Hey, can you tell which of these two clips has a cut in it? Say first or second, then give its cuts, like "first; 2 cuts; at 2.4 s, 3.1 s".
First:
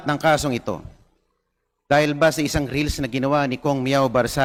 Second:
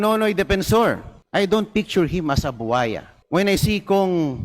second; 2 cuts; at 1.1 s, 3.1 s